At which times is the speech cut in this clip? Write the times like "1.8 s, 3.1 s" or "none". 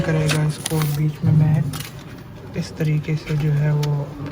none